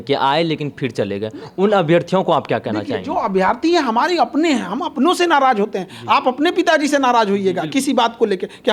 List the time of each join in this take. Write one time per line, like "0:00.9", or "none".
none